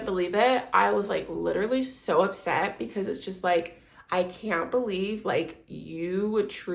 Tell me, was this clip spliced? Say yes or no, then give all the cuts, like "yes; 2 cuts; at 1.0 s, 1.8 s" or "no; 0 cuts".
no; 0 cuts